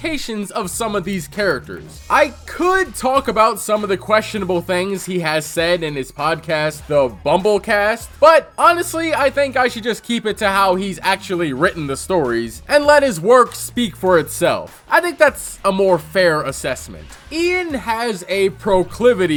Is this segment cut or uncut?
uncut